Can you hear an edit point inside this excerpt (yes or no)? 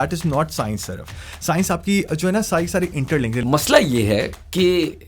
yes